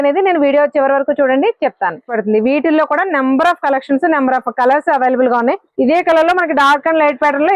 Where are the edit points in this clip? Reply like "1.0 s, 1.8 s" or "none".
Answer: 2.3 s, 5.7 s